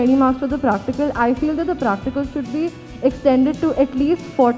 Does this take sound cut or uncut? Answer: uncut